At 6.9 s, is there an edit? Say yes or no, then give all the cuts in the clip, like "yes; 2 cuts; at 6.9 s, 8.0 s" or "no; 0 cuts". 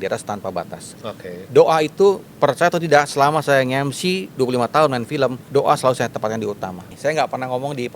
yes; 2 cuts; at 5.4 s, 6.9 s